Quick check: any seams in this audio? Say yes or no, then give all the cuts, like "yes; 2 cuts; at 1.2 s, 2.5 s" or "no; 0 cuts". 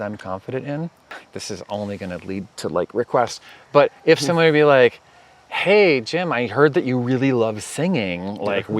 yes; 1 cut; at 1.2 s